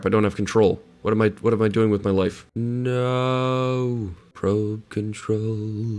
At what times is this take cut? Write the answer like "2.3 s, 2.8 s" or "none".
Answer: 2.5 s, 4.2 s

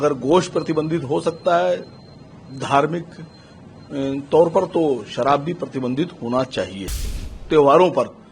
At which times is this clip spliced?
7.0 s

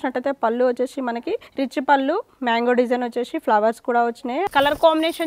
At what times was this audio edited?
1.5 s, 4.5 s

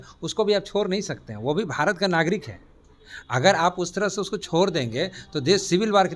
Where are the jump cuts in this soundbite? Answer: none

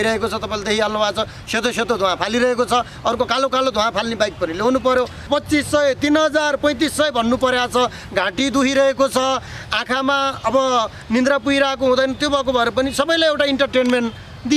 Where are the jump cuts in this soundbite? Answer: 5.2 s

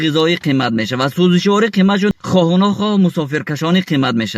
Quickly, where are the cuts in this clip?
2.1 s

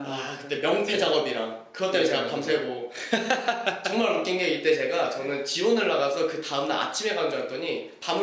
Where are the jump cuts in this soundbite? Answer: none

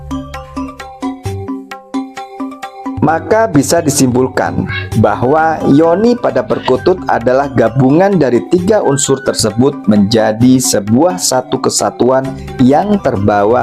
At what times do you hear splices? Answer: none

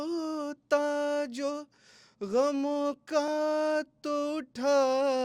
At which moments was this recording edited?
none

